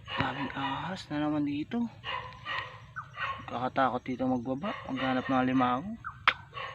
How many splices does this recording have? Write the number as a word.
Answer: zero